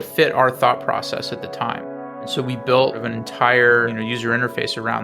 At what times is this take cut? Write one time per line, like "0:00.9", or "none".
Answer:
0:02.3
0:03.0
0:03.9